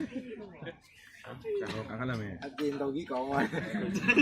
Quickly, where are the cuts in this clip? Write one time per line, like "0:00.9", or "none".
none